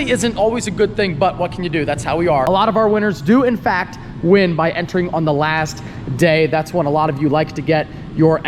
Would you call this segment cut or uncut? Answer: cut